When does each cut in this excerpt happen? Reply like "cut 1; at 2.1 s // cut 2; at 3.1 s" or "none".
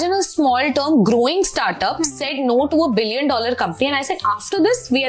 none